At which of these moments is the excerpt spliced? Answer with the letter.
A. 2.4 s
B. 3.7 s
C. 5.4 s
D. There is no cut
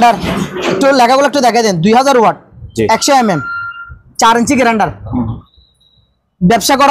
C